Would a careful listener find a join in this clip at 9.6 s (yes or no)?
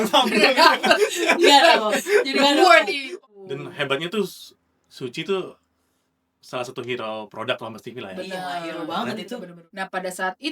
yes